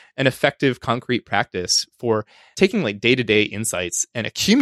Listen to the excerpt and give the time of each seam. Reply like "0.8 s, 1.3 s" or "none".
2.4 s